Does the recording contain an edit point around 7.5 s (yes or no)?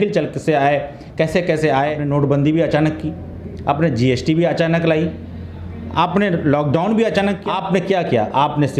yes